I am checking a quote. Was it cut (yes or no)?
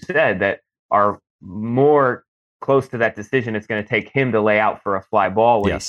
no